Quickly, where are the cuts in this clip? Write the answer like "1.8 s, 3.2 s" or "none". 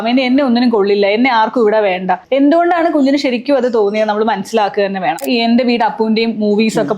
2.2 s, 5.2 s